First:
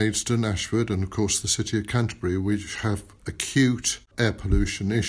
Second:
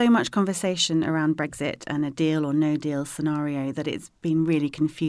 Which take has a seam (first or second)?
first